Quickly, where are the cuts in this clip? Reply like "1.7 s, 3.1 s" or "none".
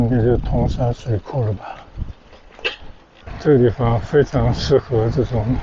3.3 s